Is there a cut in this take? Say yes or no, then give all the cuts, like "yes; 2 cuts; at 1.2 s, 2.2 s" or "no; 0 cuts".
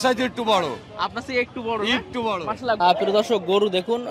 yes; 1 cut; at 2.8 s